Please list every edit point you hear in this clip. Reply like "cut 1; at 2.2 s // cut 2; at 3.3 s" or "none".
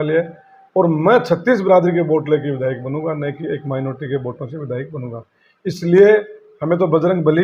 none

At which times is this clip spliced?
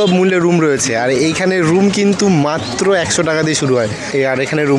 none

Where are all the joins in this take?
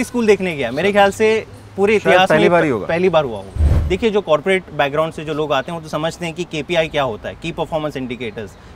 cut 1; at 3.7 s

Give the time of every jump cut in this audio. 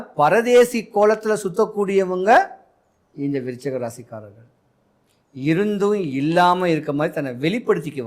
none

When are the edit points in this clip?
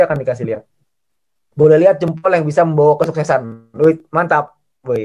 none

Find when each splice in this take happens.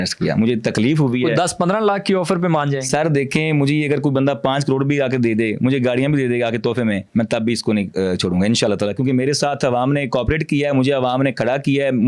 none

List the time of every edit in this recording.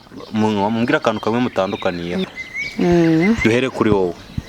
cut 1; at 2.3 s

